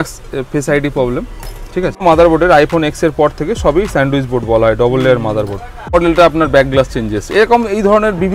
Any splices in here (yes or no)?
yes